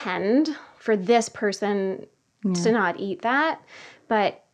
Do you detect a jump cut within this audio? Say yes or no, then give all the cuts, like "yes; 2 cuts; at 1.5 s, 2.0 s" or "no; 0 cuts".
no; 0 cuts